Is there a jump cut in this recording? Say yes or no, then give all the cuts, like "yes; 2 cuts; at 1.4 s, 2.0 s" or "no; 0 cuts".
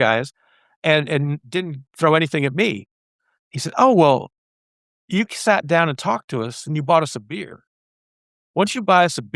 no; 0 cuts